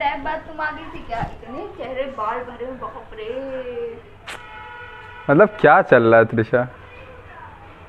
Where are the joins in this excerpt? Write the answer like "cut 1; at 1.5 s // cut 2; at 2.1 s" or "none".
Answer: none